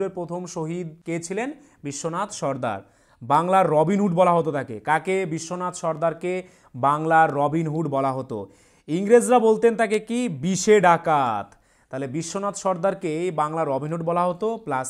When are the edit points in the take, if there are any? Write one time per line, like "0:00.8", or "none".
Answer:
0:01.0